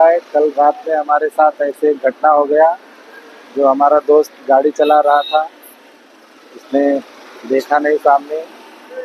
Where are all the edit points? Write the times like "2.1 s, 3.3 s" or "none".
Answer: none

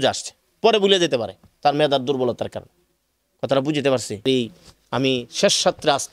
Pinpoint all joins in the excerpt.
4.2 s

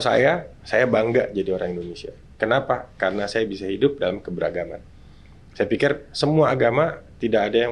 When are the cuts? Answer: none

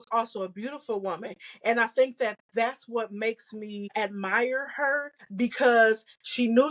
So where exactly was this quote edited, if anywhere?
3.9 s, 5.2 s

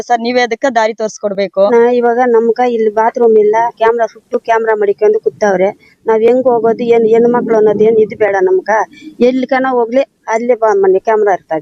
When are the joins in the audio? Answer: 1.7 s, 3.8 s

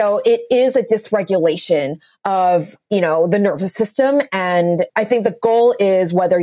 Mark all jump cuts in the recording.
2.8 s, 4.9 s

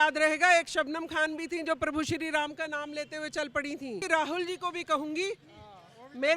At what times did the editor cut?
4.0 s

